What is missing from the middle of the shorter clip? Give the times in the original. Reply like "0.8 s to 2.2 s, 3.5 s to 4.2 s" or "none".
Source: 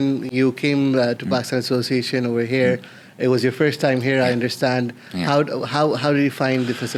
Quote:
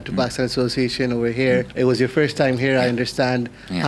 2.8 s to 3.1 s